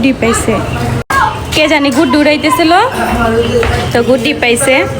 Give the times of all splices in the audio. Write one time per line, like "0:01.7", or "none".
none